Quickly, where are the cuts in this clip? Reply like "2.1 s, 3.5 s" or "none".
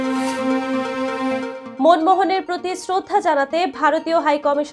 1.6 s